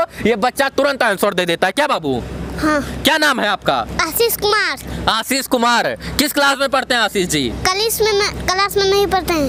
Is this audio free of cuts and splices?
yes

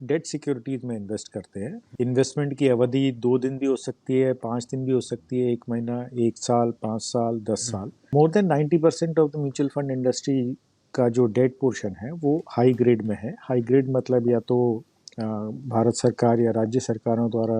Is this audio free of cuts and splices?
no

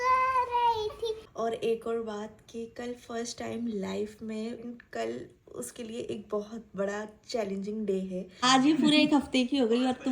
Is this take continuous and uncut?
no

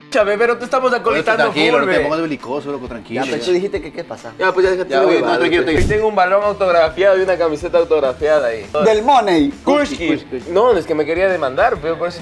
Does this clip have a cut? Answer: yes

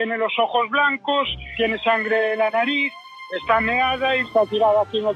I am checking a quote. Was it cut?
no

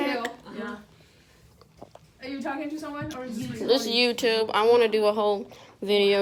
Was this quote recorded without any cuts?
yes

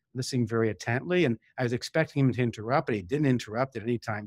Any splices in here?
no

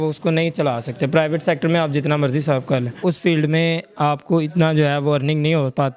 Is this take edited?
yes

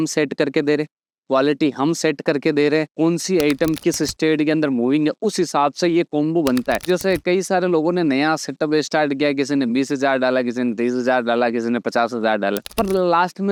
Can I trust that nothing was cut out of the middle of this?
yes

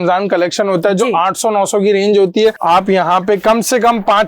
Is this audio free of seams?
no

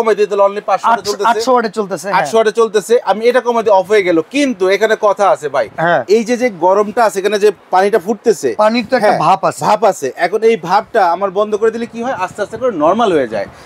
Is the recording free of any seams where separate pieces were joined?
yes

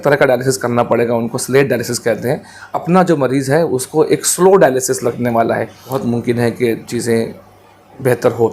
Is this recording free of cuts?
no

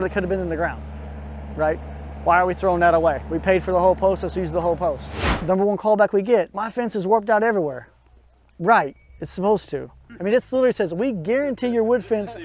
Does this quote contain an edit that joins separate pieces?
yes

